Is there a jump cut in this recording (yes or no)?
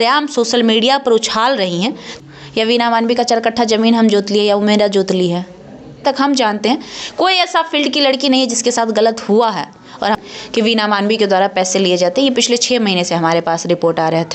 yes